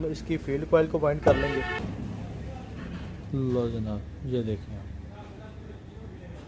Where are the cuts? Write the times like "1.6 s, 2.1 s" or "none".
1.8 s